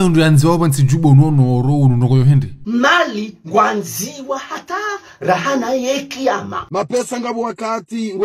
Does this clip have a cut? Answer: no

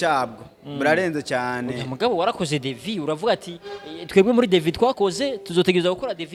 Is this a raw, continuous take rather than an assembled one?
yes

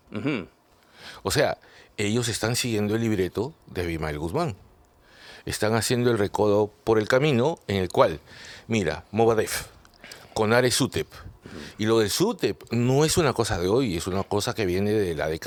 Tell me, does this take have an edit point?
no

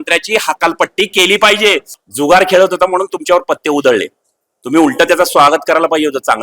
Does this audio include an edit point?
yes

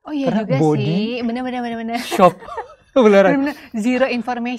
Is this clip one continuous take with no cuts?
yes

